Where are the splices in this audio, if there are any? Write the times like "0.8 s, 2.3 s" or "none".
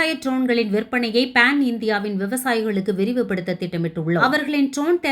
4.2 s